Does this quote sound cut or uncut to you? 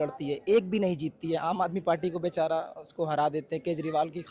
uncut